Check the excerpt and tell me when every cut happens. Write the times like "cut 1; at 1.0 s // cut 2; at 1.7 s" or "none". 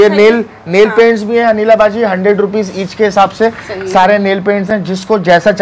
none

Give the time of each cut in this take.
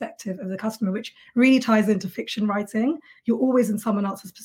none

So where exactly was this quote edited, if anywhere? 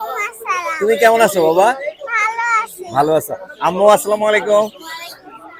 none

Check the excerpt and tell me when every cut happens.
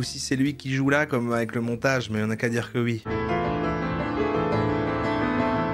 cut 1; at 3.0 s

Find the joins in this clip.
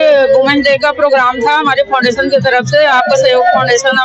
none

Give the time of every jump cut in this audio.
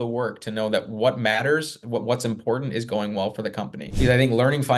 cut 1; at 3.8 s

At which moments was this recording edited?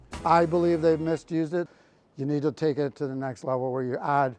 cut 1; at 1.7 s

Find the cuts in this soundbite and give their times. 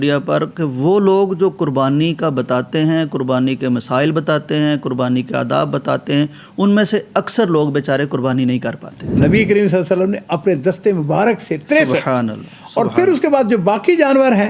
cut 1; at 9.2 s

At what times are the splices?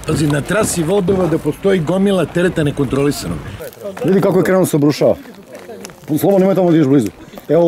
cut 1; at 3.6 s

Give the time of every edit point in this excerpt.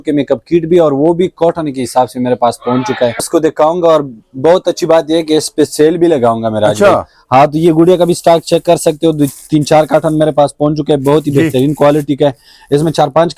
none

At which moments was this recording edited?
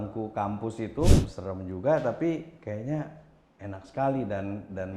cut 1; at 1.1 s

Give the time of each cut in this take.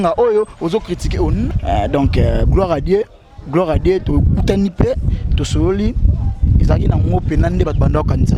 cut 1; at 1.5 s

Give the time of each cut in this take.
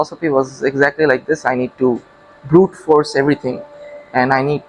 none

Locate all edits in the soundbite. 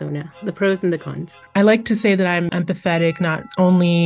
cut 1; at 1.4 s // cut 2; at 2.5 s

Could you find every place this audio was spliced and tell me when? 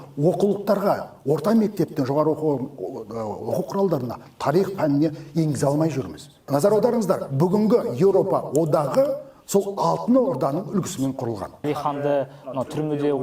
cut 1; at 6.5 s // cut 2; at 11.6 s

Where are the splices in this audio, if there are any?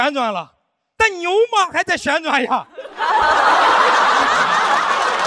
none

